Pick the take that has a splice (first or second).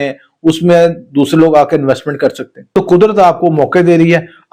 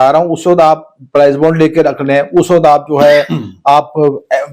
first